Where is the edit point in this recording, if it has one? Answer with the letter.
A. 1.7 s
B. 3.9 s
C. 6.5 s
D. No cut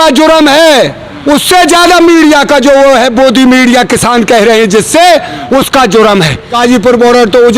C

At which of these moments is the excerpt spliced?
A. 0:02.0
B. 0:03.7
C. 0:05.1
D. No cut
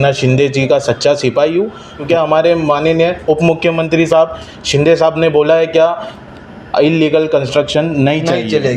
A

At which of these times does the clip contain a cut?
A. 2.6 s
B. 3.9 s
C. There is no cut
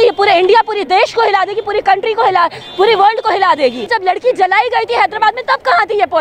B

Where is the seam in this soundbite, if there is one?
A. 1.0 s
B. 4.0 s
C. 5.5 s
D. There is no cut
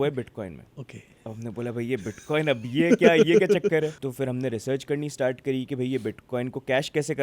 B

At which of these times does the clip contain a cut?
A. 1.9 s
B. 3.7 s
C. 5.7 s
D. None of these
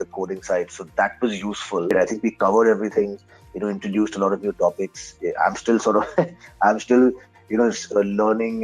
A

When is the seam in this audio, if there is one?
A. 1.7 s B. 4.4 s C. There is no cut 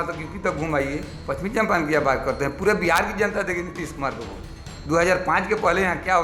C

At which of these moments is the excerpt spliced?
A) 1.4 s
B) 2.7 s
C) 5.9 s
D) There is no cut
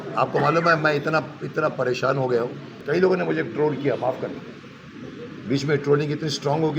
B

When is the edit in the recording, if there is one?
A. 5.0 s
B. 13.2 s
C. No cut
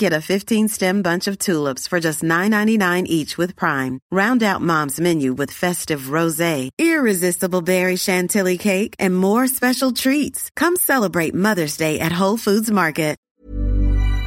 B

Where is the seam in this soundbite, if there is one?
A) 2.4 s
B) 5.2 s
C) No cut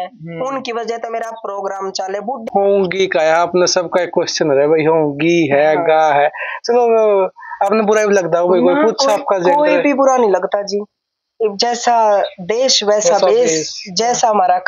A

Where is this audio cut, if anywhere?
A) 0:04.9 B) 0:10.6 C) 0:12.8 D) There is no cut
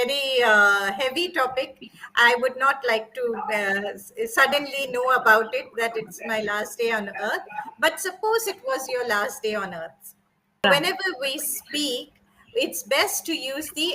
B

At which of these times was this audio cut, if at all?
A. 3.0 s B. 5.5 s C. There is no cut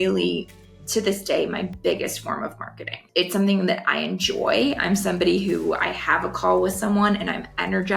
A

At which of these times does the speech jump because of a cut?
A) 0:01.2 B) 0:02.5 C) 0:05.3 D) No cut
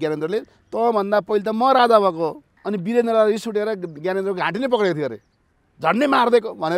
B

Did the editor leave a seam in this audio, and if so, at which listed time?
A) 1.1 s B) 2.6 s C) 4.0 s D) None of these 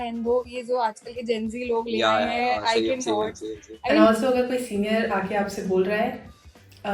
C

